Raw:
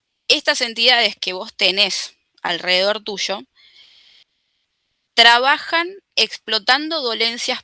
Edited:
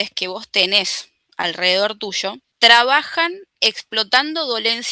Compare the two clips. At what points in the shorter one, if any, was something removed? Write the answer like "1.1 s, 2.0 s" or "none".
2.4 s